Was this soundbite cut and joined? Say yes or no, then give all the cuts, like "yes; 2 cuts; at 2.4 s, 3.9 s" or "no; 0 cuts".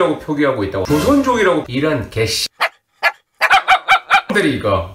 yes; 1 cut; at 1.7 s